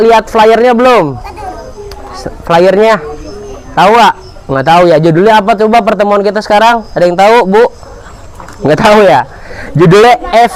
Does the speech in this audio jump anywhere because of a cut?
no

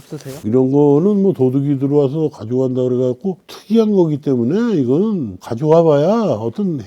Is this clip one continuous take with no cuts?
yes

